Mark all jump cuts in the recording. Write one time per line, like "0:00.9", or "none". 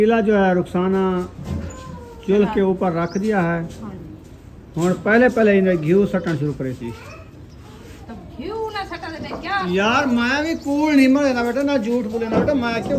none